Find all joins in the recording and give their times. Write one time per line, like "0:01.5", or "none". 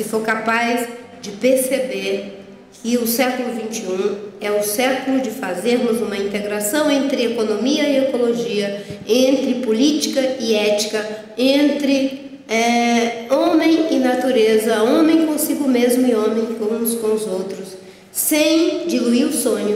none